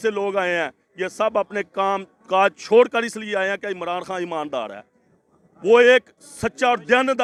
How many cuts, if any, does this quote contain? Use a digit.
0